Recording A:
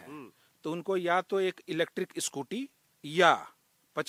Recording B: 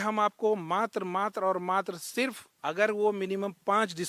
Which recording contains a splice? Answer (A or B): B